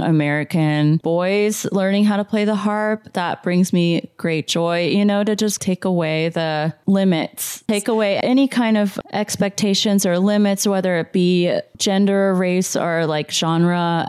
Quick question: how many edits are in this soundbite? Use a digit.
2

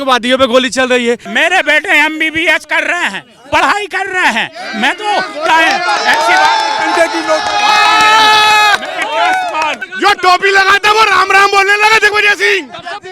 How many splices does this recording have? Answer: 2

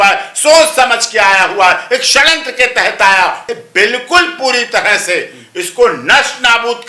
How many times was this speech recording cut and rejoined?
1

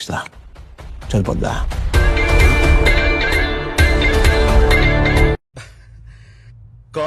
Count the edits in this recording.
1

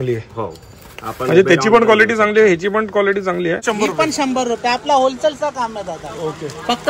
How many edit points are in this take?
1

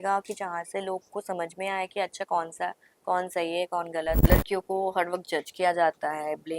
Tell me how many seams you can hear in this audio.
1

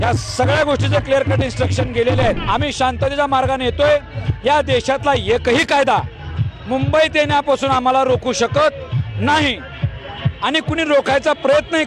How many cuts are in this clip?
1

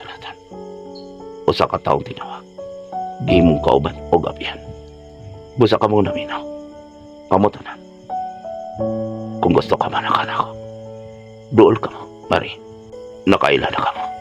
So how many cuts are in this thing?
1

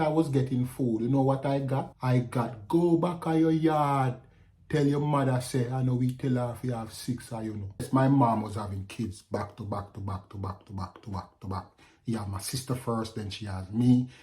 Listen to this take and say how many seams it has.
2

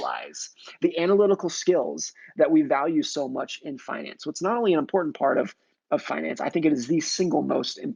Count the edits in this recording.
0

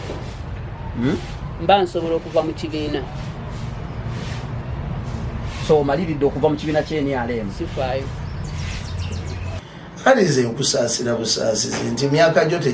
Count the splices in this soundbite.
0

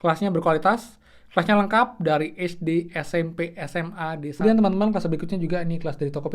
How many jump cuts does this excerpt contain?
1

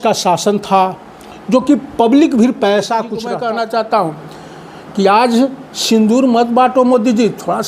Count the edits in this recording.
1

